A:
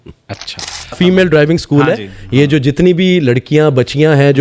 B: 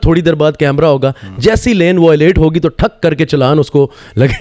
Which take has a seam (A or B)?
A